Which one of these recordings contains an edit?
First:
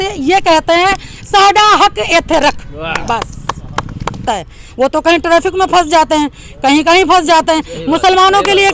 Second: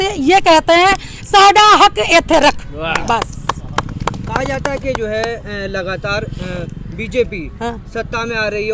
first; 1 cut; at 4.2 s

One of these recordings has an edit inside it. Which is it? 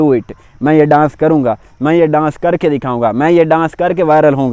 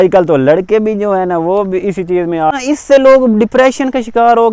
second; 1 cut; at 2.6 s

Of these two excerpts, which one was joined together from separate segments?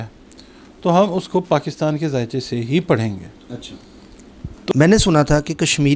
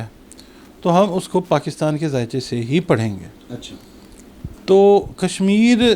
first; 1 cut; at 4.7 s

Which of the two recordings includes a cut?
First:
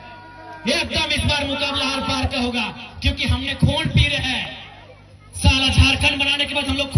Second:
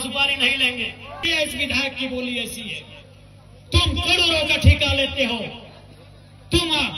second; 1 cut; at 1.2 s

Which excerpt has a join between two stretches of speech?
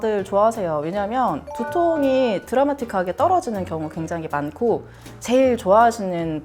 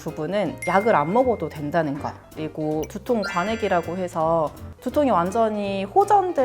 second; 1 cut; at 2.8 s

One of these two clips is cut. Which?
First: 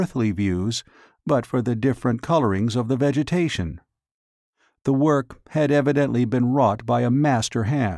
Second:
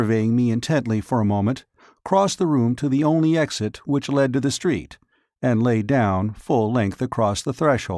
first; 1 cut; at 1.8 s

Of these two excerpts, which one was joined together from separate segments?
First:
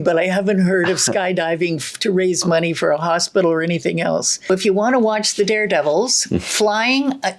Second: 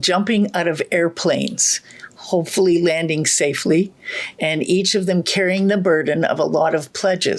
first; 1 cut; at 4.5 s

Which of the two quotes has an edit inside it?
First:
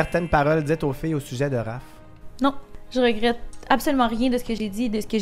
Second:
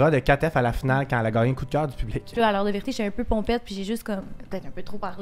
second; 1 cut; at 2.3 s

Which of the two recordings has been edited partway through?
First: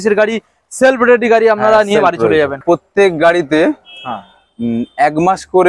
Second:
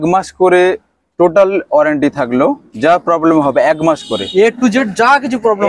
first; 1 cut; at 2.6 s

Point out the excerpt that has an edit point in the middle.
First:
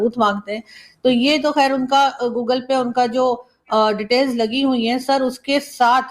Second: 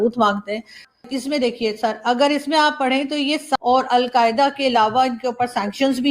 second; 2 cuts; at 0.9 s, 3.5 s

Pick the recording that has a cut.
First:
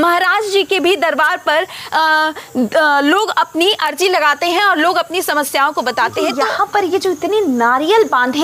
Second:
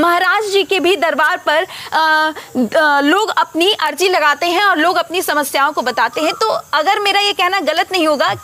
first; 1 cut; at 6.4 s

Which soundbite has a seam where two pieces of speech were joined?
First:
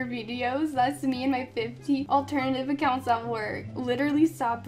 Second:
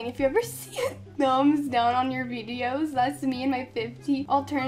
first; 1 cut; at 3.7 s

